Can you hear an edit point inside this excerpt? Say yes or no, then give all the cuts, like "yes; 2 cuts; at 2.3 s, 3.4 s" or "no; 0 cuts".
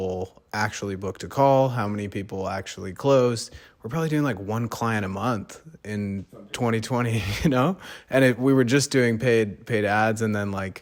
no; 0 cuts